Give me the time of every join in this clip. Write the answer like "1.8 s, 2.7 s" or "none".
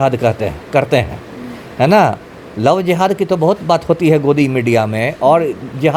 none